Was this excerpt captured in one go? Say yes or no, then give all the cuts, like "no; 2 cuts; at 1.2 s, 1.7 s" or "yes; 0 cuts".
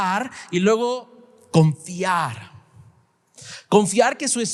yes; 0 cuts